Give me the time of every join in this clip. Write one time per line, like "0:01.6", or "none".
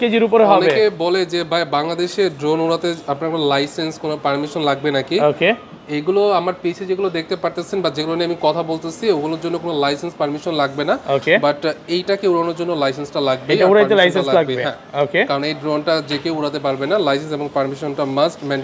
none